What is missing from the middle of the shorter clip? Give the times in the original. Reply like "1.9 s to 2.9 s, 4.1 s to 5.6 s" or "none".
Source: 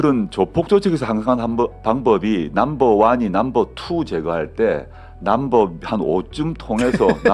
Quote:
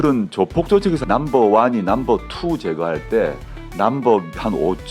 1.0 s to 2.5 s